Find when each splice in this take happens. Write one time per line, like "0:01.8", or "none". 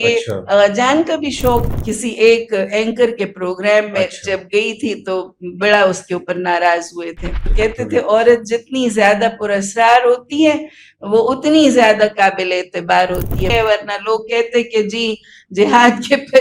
0:01.7
0:07.4
0:13.5